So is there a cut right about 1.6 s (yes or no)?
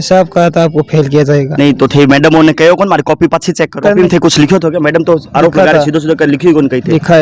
no